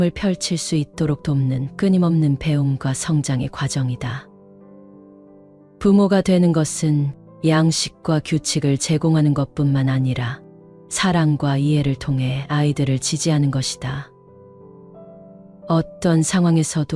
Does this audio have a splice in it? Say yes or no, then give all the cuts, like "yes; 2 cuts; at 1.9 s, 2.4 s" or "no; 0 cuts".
no; 0 cuts